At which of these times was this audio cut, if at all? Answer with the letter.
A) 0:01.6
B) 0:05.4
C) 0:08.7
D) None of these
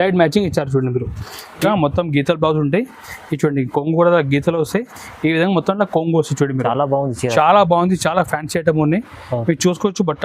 A